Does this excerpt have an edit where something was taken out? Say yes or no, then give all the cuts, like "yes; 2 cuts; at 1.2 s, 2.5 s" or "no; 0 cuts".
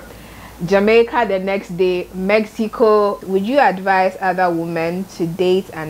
yes; 1 cut; at 3.2 s